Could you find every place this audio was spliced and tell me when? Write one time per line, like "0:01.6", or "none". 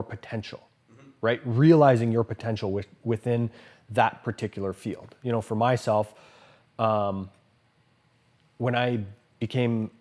none